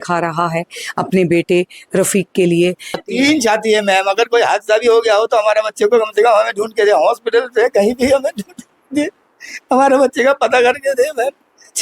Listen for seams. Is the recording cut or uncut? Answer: cut